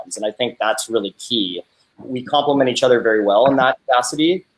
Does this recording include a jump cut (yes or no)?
yes